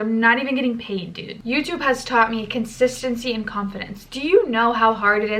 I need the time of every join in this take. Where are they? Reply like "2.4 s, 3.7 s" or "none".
1.3 s